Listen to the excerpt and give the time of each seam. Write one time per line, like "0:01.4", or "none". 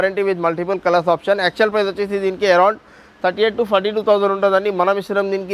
none